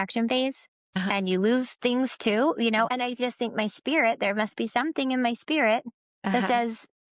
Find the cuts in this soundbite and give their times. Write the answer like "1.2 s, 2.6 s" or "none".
2.9 s